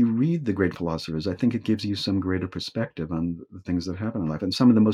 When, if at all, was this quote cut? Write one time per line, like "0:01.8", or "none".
none